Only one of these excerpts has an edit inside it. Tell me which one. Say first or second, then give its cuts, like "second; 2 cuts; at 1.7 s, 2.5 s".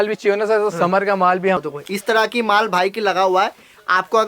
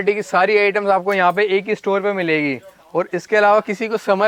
first; 1 cut; at 1.6 s